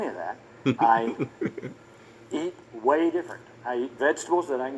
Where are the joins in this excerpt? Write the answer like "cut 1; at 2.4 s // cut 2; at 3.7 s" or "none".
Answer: cut 1; at 3.4 s